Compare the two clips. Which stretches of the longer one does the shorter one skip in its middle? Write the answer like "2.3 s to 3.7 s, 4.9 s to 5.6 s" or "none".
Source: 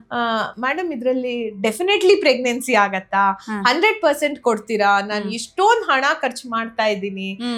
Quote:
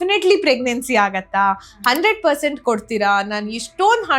none